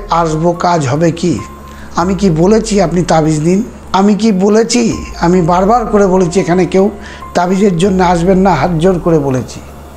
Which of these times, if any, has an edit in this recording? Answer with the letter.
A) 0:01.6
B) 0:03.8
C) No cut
B